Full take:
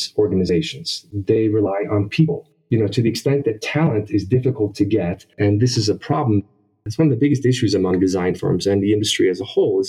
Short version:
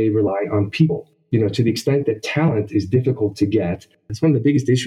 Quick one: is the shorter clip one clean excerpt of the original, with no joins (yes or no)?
no